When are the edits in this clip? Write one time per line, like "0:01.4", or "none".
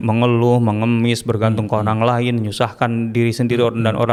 none